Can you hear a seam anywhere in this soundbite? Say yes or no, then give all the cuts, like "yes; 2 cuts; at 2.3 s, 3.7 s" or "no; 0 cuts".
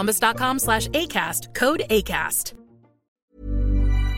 yes; 1 cut; at 3.2 s